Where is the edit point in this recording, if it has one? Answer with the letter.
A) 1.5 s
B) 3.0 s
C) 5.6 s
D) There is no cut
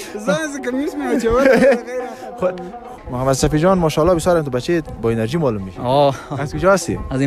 B